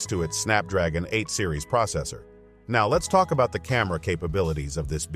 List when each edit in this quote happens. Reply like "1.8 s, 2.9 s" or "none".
none